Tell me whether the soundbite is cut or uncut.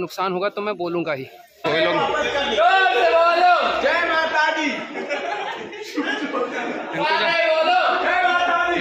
cut